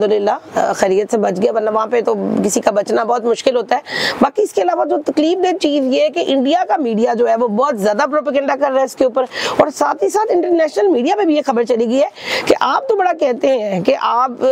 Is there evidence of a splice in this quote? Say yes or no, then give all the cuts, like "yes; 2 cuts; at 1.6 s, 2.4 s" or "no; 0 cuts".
no; 0 cuts